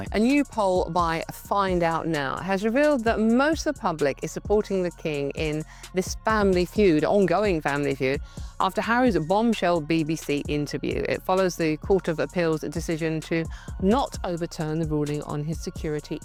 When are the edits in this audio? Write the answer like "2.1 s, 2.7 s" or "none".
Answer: none